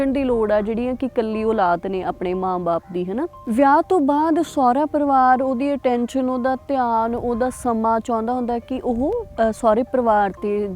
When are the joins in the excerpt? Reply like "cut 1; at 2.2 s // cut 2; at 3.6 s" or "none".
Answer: cut 1; at 3.4 s